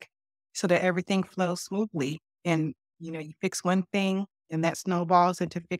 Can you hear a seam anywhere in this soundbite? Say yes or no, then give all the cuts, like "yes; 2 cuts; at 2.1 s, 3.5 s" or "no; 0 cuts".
no; 0 cuts